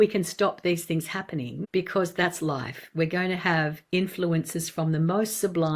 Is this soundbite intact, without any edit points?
no; 1 cut; at 1.6 s

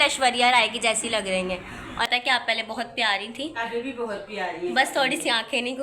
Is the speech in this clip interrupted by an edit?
yes; 1 cut; at 2.1 s

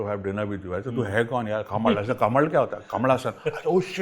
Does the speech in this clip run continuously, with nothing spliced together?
yes; 0 cuts

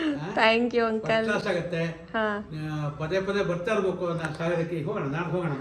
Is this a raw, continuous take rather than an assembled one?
yes; 0 cuts

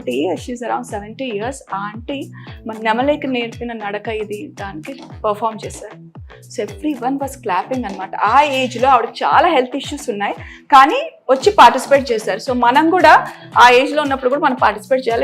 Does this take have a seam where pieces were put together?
no; 0 cuts

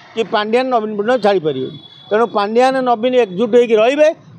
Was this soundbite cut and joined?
no; 0 cuts

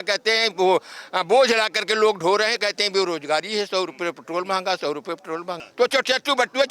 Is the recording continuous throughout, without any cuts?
no; 1 cut; at 5.6 s

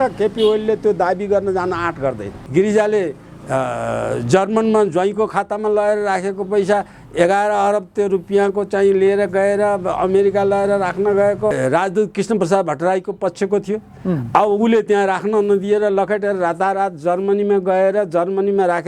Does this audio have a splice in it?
yes; 2 cuts; at 2.4 s, 11.5 s

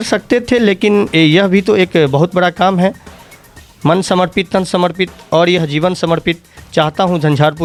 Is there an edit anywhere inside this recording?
no; 0 cuts

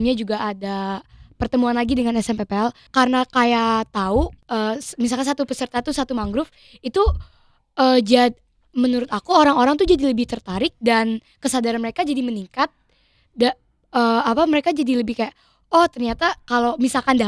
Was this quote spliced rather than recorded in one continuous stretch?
yes; 2 cuts; at 2.8 s, 4.4 s

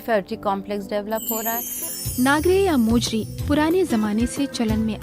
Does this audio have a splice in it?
yes; 1 cut; at 1.8 s

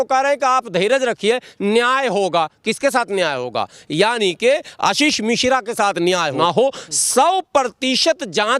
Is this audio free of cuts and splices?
no; 1 cut; at 6.3 s

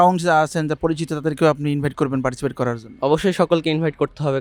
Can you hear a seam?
no; 0 cuts

